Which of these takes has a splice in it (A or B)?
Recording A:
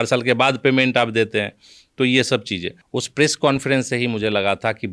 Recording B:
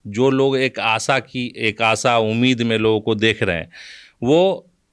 A